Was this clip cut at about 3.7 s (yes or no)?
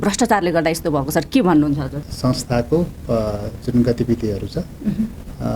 no